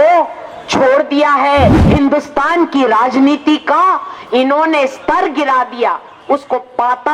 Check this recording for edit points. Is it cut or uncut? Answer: cut